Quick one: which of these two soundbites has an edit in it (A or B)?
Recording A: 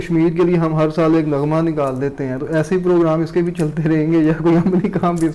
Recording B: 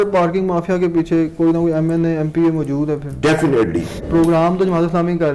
B